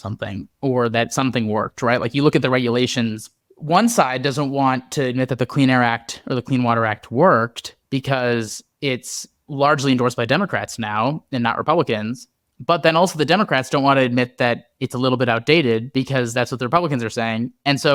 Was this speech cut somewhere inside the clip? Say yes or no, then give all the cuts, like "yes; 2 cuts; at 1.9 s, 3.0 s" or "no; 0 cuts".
no; 0 cuts